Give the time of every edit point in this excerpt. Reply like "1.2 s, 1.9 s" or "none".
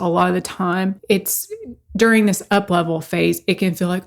none